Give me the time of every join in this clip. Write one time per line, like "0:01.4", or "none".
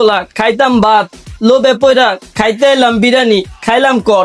none